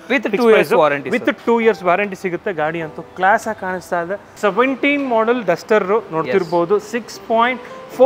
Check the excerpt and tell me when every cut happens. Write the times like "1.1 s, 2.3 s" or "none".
4.2 s